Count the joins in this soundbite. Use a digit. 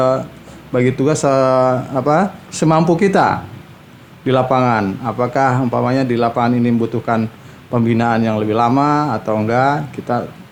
0